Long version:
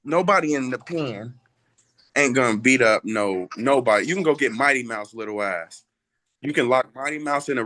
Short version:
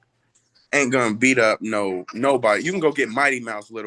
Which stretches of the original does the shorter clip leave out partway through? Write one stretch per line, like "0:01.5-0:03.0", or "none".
none